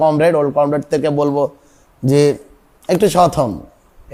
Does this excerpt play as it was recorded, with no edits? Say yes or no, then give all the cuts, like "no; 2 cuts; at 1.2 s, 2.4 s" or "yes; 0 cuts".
yes; 0 cuts